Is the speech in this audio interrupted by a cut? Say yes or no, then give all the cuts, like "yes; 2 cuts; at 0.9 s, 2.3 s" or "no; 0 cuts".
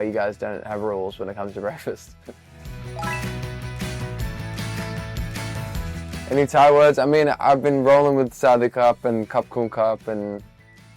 no; 0 cuts